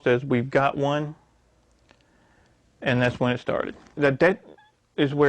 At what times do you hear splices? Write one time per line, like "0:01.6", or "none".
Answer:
0:04.0